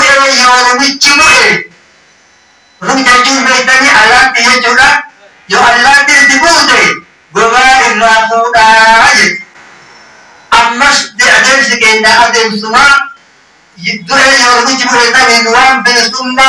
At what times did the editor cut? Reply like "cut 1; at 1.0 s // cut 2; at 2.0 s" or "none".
none